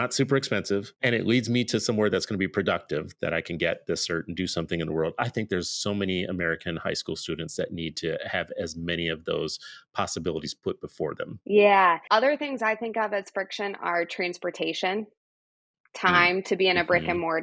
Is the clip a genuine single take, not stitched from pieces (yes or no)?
no